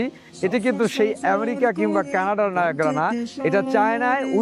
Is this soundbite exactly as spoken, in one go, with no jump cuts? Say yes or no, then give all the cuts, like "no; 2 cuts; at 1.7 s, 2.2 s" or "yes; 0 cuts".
yes; 0 cuts